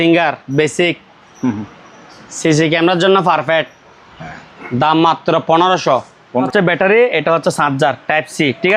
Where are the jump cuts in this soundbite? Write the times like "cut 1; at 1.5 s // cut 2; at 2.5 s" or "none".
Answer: cut 1; at 6.5 s